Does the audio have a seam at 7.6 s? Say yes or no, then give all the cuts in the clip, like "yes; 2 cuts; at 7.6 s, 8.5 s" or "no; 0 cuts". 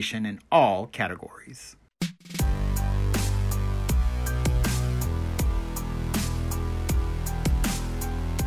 no; 1 cut; at 1.8 s